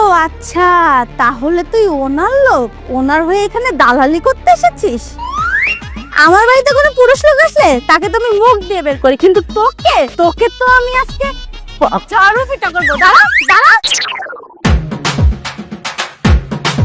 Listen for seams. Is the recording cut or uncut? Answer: uncut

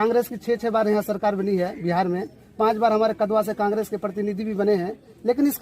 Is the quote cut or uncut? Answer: uncut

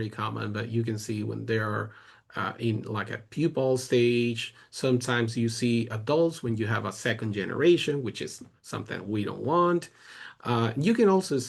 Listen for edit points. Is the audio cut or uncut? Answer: uncut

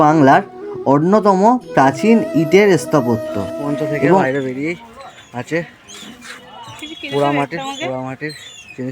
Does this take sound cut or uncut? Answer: cut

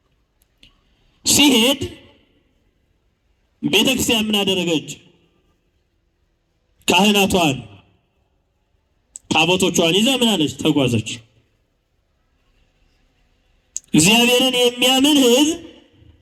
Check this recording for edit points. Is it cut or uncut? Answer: uncut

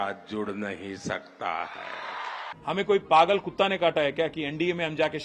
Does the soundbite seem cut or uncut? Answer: cut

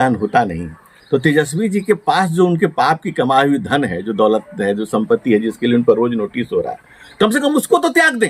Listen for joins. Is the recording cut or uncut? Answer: uncut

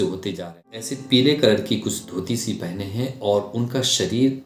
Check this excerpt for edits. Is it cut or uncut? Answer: cut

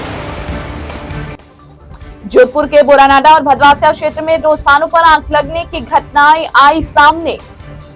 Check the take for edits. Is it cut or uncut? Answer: uncut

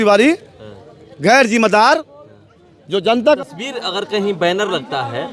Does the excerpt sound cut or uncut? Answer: cut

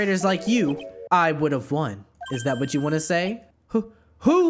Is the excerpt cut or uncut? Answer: cut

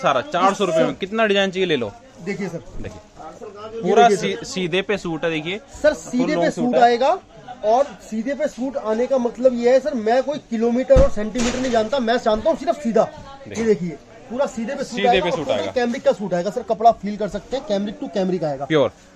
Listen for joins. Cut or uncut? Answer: uncut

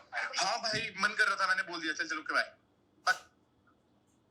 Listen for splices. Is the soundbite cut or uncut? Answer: uncut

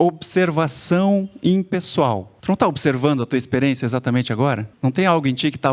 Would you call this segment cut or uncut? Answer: cut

